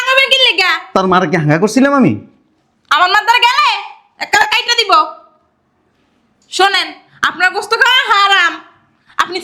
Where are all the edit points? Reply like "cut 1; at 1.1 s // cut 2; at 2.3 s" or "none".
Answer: none